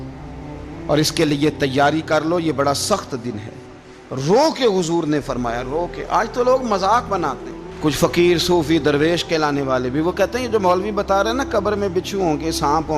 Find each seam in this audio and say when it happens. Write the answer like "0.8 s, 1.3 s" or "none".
none